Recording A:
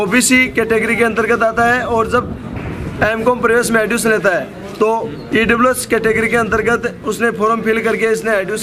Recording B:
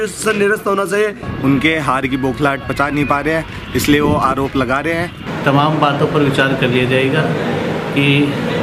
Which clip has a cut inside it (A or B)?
B